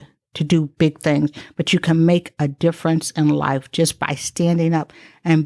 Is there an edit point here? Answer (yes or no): no